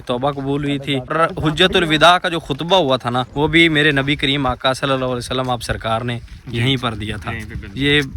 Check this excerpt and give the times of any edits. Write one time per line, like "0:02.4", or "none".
0:01.1
0:03.3

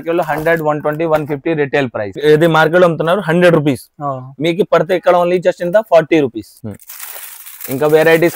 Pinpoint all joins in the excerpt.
0:02.2
0:06.5

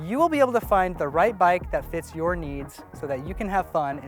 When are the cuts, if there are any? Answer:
none

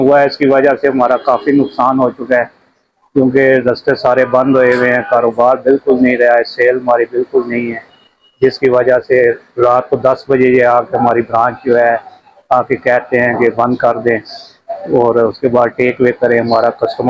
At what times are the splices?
none

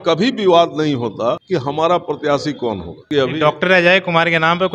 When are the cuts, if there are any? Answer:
0:01.4
0:03.0

